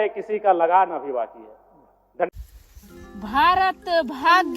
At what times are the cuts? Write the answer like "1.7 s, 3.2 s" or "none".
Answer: 2.3 s